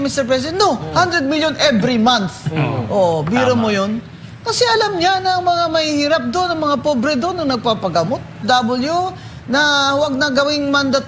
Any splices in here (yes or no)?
yes